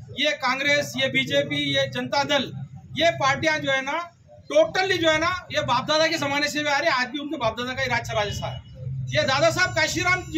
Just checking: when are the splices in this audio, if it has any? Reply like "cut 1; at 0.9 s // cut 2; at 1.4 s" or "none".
none